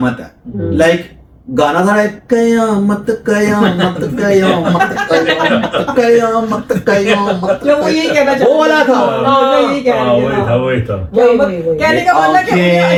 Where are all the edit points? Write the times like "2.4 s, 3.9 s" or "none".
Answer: none